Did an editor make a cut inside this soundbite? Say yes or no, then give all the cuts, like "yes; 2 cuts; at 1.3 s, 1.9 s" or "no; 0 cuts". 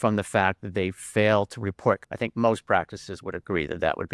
yes; 1 cut; at 2.0 s